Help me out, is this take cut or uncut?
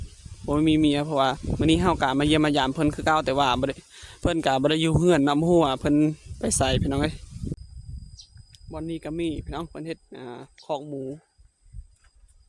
cut